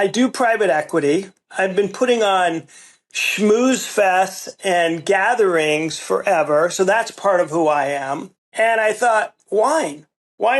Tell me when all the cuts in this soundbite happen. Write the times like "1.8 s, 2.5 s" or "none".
1.5 s, 8.4 s